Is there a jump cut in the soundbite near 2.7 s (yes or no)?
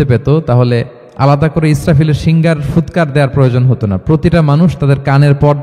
no